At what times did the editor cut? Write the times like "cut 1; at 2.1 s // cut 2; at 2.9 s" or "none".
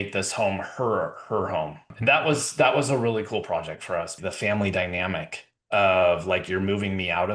cut 1; at 1.9 s // cut 2; at 4.2 s